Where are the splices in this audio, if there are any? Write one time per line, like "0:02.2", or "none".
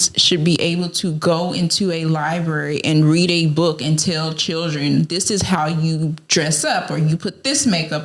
none